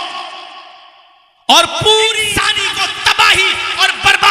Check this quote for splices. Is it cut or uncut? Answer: cut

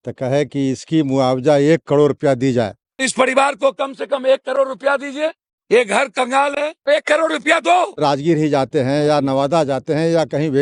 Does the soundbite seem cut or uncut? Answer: uncut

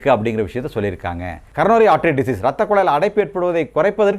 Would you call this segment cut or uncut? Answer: cut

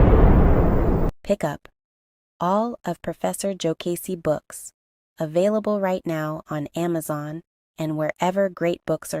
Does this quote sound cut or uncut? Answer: cut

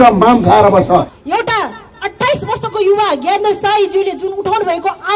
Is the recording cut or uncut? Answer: cut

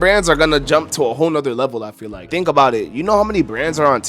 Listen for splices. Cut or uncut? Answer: uncut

